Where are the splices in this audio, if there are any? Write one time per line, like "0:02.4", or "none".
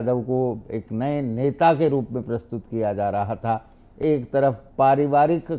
none